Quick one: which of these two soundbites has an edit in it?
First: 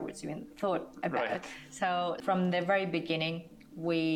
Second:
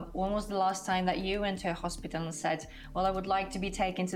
first; 1 cut; at 2.2 s

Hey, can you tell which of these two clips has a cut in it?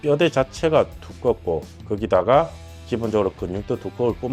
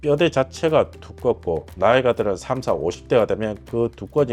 second; 1 cut; at 1.7 s

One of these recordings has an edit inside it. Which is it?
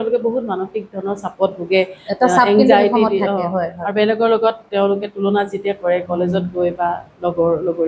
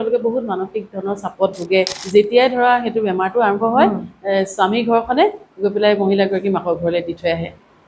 second; 1 cut; at 2.0 s

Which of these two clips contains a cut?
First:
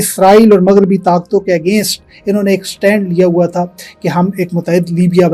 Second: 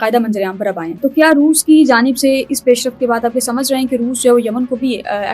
second; 1 cut; at 1.0 s

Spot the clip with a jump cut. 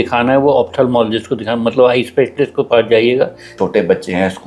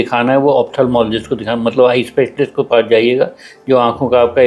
first; 1 cut; at 3.5 s

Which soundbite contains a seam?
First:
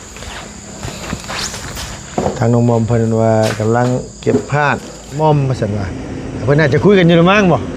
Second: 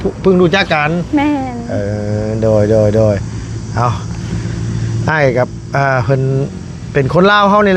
first; 1 cut; at 5.2 s

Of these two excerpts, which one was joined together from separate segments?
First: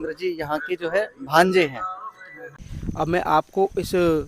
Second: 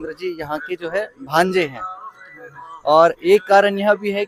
first; 1 cut; at 2.6 s

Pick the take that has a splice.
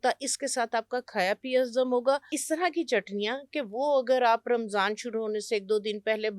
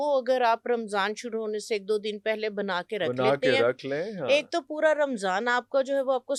first; 1 cut; at 2.4 s

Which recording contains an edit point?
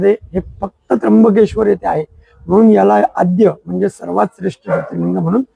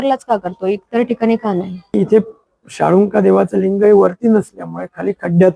second; 1 cut; at 1.9 s

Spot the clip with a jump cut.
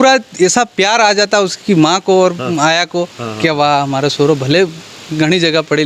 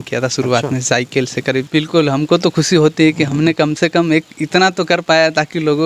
second; 1 cut; at 1.7 s

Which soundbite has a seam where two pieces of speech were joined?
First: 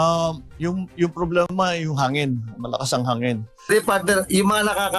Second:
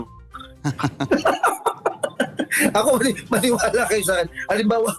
first; 1 cut; at 3.7 s

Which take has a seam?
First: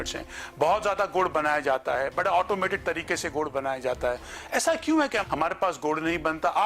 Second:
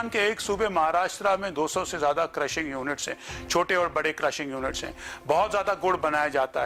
first; 1 cut; at 5.2 s

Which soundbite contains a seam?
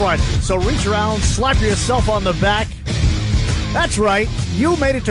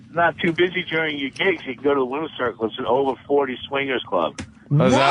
second; 1 cut; at 2.7 s

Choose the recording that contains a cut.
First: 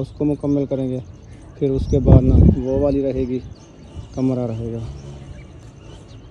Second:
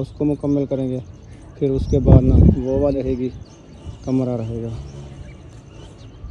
second; 1 cut; at 3.0 s

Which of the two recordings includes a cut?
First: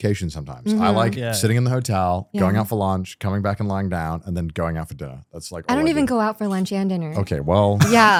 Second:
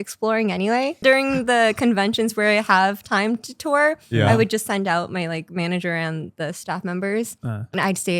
second; 1 cut; at 1.0 s

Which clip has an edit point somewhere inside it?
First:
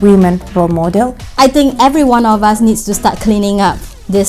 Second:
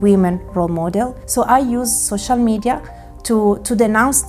first; 1 cut; at 1.2 s

